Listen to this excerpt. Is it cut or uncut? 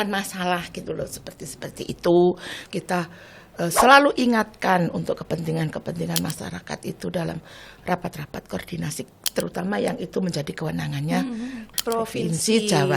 cut